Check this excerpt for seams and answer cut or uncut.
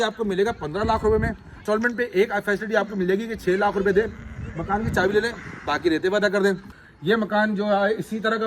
cut